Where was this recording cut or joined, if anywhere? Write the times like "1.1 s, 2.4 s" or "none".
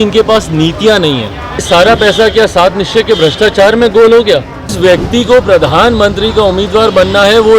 1.6 s, 4.8 s

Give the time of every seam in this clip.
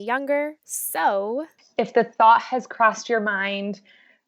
1.6 s

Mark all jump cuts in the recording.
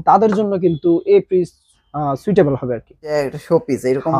3.1 s

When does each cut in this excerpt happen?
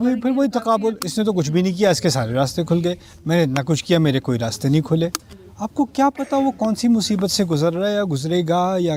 none

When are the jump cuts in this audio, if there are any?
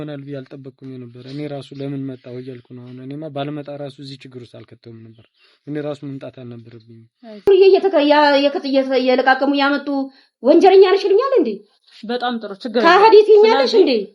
7.5 s

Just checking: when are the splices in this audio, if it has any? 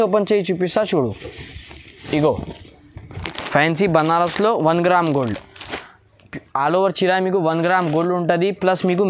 3.1 s

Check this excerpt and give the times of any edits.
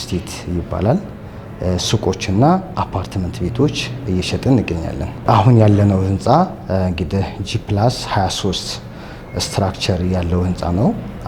5.1 s

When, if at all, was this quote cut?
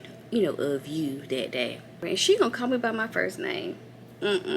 2.0 s

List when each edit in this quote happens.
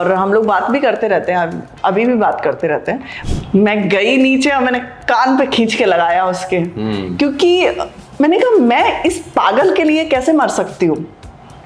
3.1 s

